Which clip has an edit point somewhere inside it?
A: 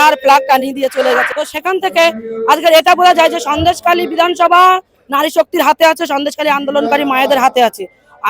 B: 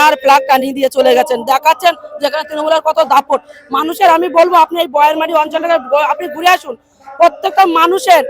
A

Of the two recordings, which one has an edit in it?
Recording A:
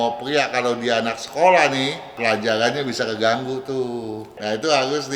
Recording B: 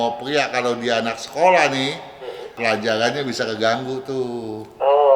A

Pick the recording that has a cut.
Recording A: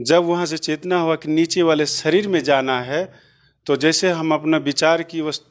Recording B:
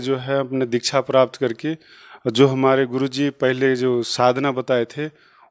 B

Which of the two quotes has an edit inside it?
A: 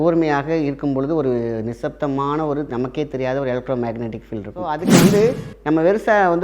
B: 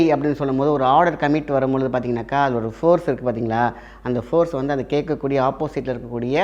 A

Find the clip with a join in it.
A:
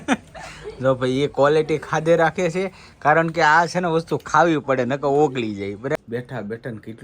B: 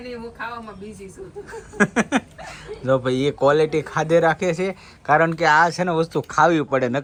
A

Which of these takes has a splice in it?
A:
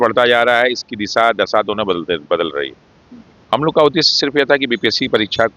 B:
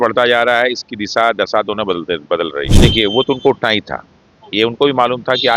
B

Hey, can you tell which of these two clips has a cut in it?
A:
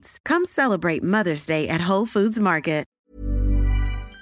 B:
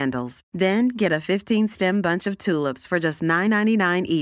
A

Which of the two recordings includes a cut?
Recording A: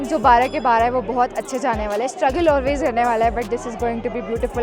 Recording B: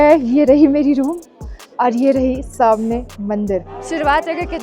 B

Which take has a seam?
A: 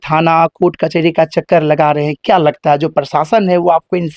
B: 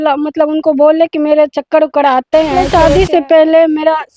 B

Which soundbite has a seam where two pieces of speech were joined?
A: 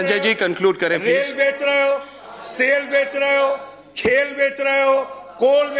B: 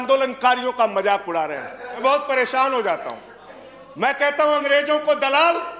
B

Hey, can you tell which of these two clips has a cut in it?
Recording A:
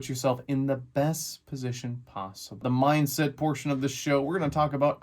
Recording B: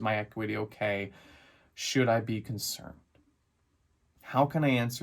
A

